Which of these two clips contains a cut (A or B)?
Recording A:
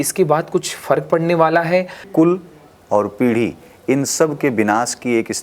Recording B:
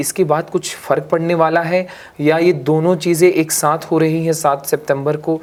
A